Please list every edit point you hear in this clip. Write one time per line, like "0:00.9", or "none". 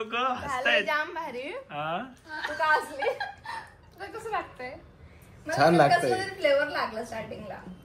none